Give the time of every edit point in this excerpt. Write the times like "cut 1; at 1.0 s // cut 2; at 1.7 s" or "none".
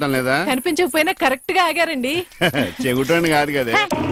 none